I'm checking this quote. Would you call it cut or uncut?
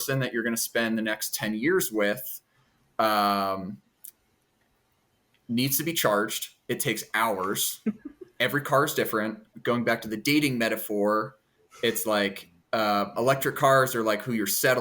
cut